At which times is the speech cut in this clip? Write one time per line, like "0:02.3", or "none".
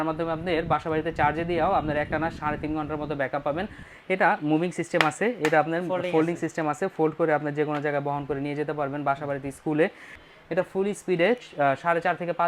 0:03.8
0:10.1